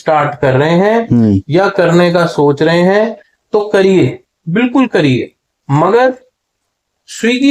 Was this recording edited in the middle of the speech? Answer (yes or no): no